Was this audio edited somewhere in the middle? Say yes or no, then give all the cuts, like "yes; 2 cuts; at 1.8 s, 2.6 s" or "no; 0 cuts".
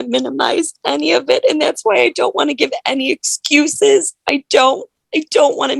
no; 0 cuts